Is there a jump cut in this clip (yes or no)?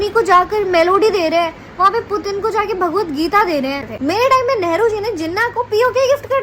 yes